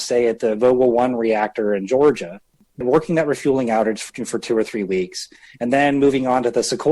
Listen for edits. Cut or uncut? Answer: cut